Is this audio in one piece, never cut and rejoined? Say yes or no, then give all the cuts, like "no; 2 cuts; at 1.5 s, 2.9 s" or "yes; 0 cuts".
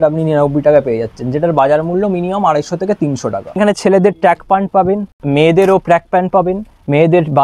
no; 1 cut; at 3.4 s